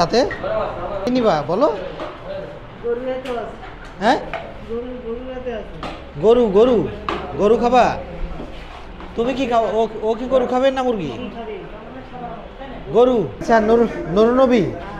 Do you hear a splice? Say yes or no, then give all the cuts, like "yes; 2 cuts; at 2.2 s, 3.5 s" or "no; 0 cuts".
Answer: yes; 2 cuts; at 1.1 s, 13.4 s